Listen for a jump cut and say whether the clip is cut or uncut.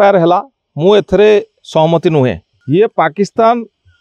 cut